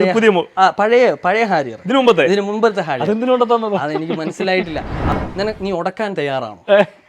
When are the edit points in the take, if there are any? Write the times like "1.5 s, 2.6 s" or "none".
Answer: 5.0 s